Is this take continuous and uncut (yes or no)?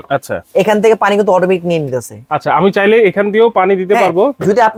yes